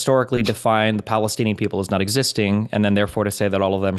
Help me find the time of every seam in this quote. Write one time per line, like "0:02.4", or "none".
none